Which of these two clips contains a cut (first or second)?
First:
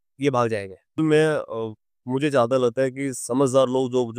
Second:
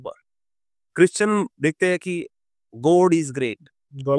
first